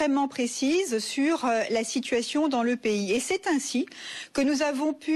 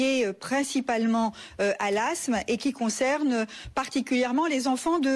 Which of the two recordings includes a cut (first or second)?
second